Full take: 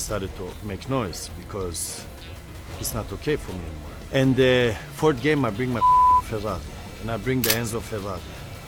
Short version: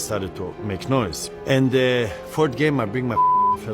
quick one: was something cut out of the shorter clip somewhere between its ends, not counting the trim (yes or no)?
yes